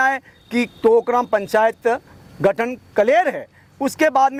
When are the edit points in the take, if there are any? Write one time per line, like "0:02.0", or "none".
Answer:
none